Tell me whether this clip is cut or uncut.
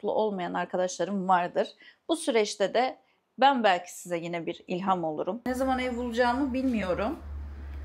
cut